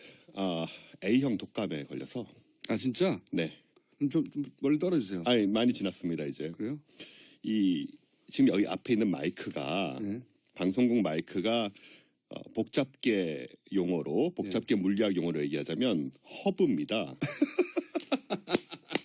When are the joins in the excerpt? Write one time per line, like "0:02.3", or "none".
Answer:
0:09.5